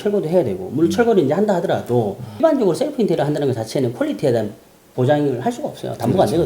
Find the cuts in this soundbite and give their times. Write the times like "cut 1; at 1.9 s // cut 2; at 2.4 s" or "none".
cut 1; at 2.4 s